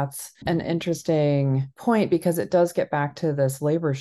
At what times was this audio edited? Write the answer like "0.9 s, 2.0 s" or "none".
1.7 s